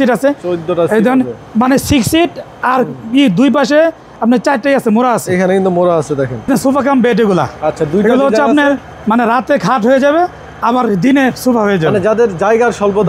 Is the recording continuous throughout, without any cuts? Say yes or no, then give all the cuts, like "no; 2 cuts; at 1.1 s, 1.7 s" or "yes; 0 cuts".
no; 1 cut; at 6.5 s